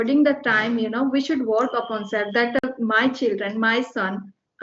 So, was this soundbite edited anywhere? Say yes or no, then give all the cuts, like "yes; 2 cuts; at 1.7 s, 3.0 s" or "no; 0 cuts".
no; 0 cuts